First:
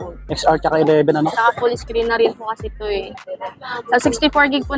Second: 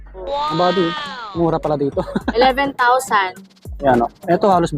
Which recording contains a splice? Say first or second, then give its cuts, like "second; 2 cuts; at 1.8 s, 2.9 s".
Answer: second; 1 cut; at 3.4 s